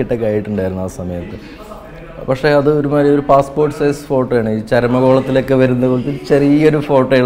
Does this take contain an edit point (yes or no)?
no